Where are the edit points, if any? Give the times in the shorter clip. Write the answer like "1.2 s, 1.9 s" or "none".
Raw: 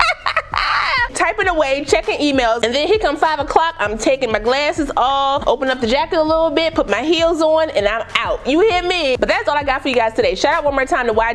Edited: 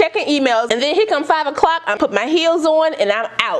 1.9 s